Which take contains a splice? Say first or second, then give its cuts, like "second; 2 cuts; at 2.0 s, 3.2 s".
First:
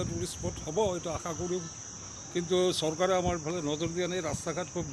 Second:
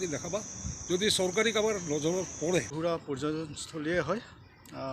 second; 1 cut; at 2.7 s